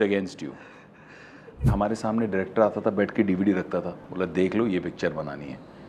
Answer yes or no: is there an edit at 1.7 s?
yes